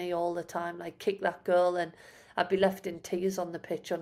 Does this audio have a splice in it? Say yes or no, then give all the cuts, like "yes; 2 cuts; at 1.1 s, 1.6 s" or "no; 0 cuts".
no; 0 cuts